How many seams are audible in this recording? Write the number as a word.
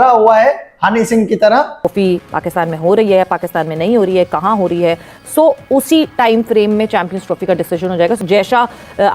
two